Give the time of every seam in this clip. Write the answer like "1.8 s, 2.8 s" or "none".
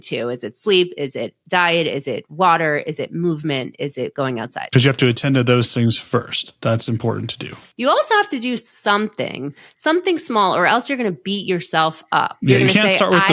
7.5 s